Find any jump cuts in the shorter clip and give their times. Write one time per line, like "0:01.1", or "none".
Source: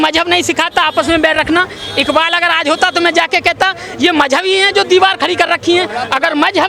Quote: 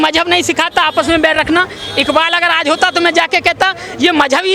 none